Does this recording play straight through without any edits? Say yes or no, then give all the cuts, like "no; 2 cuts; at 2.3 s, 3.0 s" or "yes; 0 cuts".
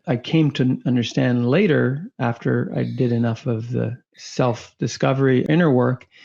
yes; 0 cuts